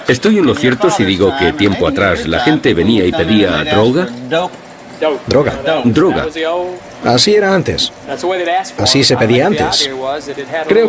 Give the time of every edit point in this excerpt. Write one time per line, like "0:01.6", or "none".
0:03.3